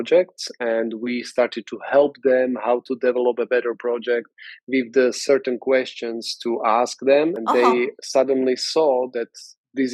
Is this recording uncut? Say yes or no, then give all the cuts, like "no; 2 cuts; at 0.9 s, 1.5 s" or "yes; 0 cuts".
no; 1 cut; at 7.4 s